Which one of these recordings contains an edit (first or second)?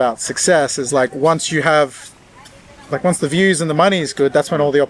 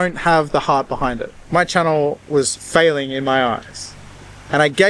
second